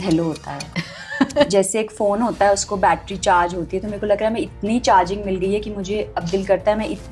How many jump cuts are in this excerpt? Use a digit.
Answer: 1